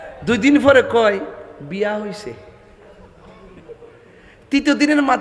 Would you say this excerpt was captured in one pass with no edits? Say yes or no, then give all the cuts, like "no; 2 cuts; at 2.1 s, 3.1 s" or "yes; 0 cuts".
yes; 0 cuts